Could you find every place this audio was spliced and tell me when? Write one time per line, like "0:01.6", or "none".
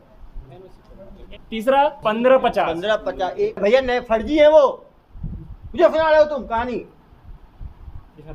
0:01.2
0:02.0
0:03.6